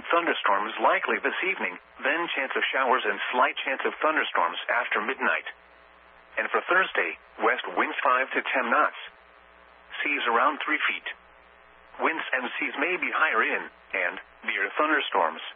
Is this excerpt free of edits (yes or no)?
yes